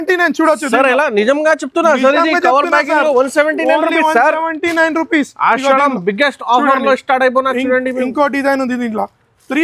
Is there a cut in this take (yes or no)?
no